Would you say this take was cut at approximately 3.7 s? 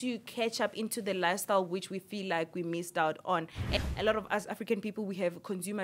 yes; 1 cut; at 3.7 s

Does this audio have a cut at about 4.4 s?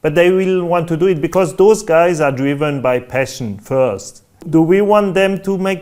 yes; 1 cut; at 4.4 s

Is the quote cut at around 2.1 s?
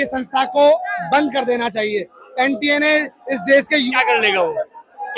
no; 1 cut; at 3.9 s

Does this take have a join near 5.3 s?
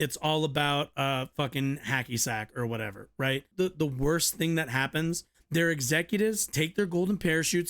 yes; 2 cuts; at 3.5 s, 5.3 s

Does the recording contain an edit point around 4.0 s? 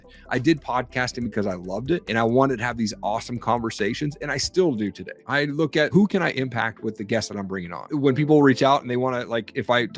no; 3 cuts; at 2.0 s, 5.4 s, 7.8 s

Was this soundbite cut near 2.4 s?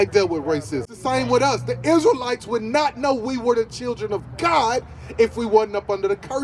no; 1 cut; at 0.9 s

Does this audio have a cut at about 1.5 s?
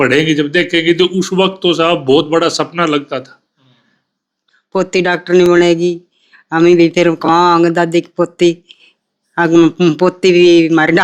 no; 1 cut; at 4.4 s

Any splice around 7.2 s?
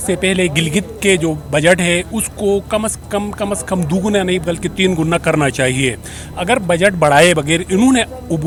no; 0 cuts

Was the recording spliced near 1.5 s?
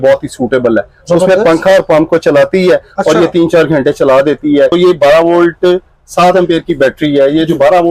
no; 1 cut; at 4.7 s

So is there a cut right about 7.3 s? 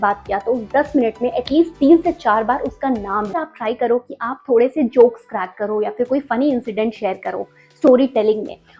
no; 1 cut; at 3.4 s

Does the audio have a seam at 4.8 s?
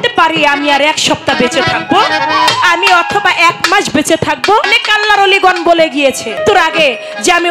yes; 2 cuts; at 4.8 s, 6.4 s

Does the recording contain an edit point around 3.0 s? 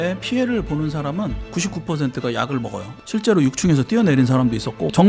yes; 1 cut; at 3.0 s

